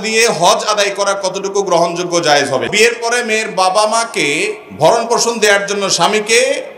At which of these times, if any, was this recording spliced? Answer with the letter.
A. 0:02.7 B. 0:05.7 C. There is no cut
A